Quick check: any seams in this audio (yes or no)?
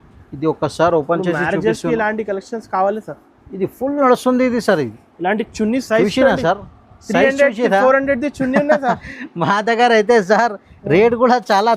no